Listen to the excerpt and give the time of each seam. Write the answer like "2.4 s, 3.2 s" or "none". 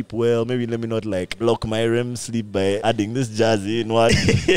1.3 s, 2.8 s